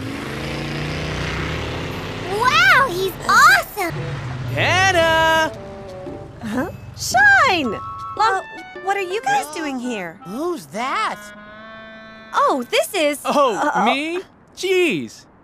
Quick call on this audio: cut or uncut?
cut